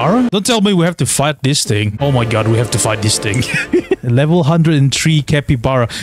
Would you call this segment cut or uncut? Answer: uncut